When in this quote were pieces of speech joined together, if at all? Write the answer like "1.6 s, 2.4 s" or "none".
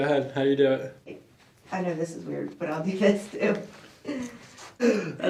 none